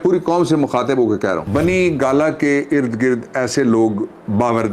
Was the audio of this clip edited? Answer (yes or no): yes